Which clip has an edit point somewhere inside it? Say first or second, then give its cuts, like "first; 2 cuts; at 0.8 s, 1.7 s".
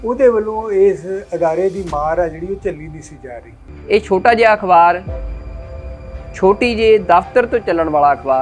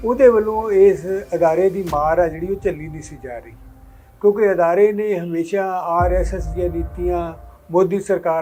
first; 1 cut; at 3.7 s